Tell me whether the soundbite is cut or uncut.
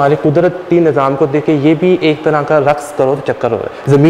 uncut